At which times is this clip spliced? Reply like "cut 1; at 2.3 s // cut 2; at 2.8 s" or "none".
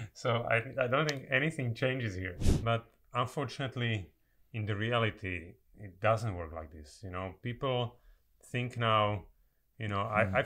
cut 1; at 2.4 s